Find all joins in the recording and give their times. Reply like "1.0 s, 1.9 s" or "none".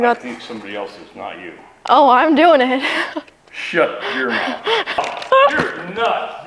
5.0 s